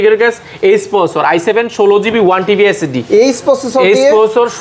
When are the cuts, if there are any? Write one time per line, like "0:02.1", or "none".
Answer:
none